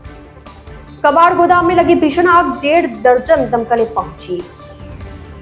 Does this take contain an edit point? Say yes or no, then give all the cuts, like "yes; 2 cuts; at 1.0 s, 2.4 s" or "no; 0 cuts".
yes; 1 cut; at 1.0 s